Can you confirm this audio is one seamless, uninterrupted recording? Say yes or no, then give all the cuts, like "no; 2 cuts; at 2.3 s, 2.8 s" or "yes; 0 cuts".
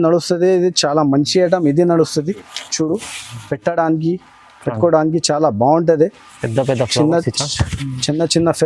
yes; 0 cuts